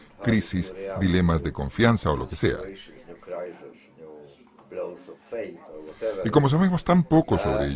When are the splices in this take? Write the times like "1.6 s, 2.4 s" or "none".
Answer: 4.8 s